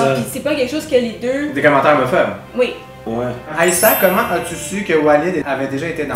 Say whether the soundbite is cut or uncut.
cut